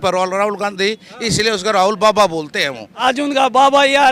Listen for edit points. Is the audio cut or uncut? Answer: cut